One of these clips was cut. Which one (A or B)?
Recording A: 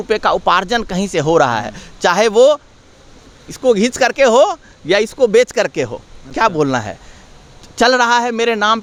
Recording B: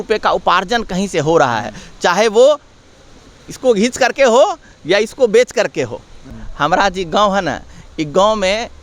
B